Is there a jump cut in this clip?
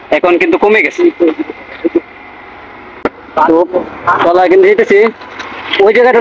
no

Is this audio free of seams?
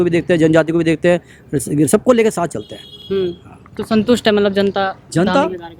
yes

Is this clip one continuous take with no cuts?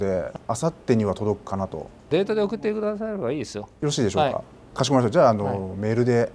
no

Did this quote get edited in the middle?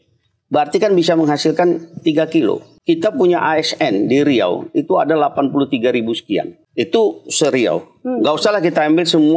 yes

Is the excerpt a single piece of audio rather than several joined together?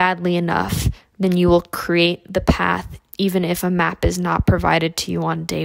yes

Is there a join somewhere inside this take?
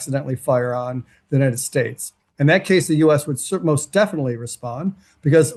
no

